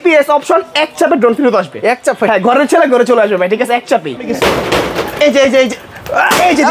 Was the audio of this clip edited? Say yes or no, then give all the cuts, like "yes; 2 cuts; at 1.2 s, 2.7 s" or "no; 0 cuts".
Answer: yes; 1 cut; at 4.3 s